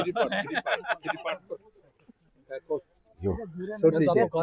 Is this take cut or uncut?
uncut